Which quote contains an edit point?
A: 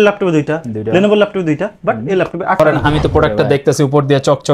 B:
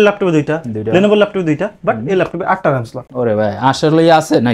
A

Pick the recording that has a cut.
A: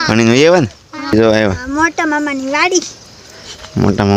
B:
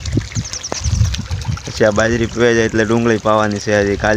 A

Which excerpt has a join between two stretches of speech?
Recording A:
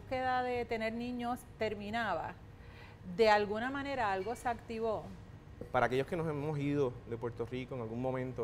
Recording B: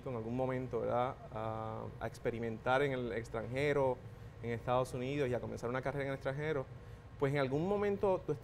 A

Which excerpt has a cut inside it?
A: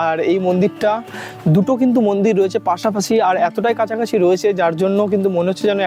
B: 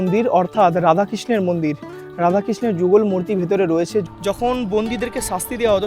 B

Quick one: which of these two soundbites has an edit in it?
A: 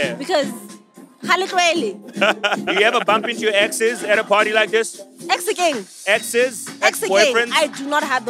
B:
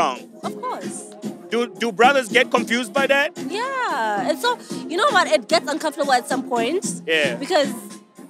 A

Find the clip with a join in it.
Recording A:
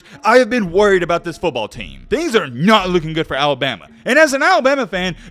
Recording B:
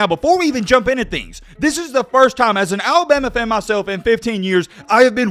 A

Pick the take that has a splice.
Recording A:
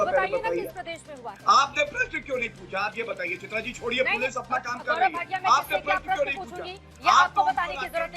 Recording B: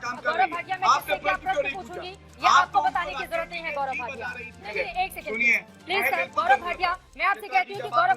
B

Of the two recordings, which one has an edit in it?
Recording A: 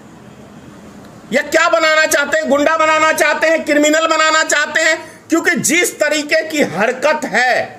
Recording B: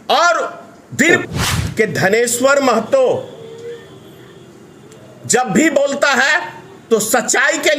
B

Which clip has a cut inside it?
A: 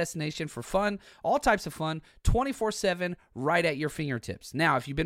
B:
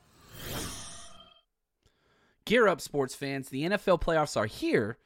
B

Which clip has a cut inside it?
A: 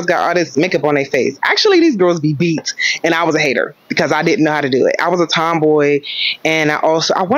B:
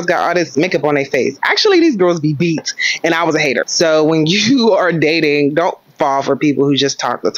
B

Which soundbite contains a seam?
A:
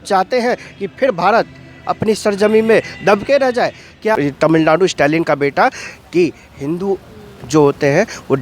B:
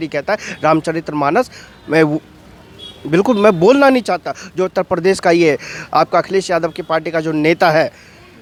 A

